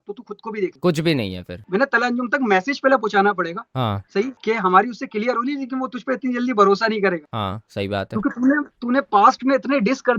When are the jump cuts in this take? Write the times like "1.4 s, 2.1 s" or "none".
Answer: 1.6 s